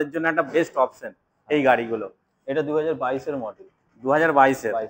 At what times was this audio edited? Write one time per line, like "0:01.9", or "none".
none